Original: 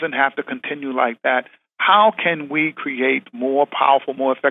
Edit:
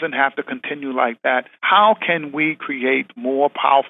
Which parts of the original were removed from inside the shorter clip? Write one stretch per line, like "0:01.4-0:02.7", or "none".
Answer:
0:01.5-0:01.7